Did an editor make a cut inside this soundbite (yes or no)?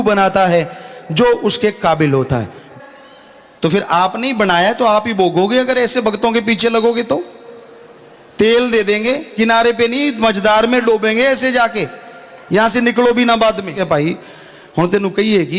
yes